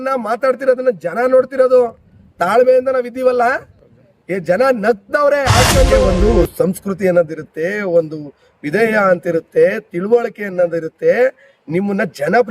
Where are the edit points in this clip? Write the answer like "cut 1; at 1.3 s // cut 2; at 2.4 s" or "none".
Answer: cut 1; at 6.0 s